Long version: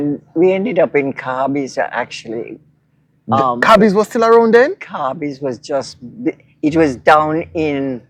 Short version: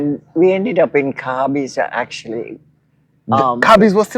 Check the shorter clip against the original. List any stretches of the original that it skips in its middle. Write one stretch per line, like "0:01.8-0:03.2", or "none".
none